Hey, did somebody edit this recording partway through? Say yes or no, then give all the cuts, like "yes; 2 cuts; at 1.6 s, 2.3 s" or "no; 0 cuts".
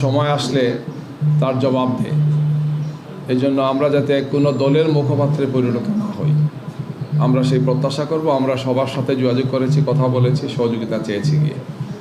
no; 0 cuts